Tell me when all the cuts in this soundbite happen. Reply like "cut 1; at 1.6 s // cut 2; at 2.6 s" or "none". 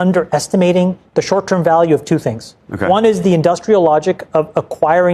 none